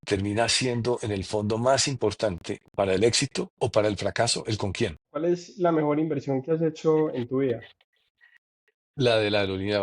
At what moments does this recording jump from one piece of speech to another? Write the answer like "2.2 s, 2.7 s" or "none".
3.4 s, 5.0 s